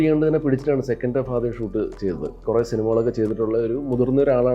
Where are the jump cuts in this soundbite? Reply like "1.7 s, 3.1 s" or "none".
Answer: 2.4 s